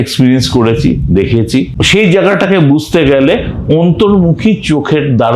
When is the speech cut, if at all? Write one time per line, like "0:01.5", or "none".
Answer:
0:01.8